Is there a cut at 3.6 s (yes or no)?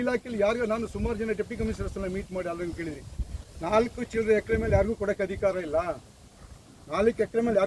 no